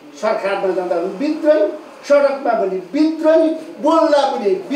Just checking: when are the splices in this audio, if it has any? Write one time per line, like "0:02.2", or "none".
none

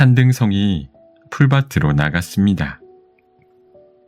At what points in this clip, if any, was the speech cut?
0:02.8

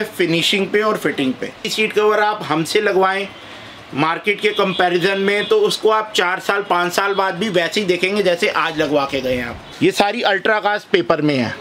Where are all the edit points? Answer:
0:01.7
0:09.7

